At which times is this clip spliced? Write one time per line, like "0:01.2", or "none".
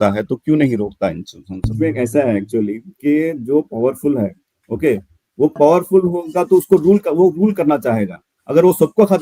0:01.7